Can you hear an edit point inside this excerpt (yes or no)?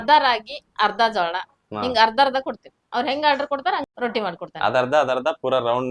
yes